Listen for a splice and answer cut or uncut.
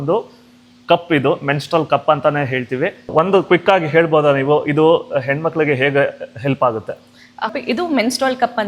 uncut